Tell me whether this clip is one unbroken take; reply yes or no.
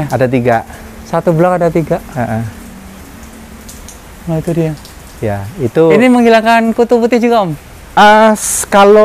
yes